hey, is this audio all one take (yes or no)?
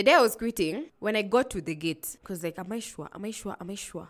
yes